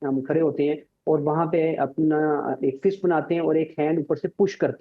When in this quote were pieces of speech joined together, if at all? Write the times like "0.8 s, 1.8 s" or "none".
none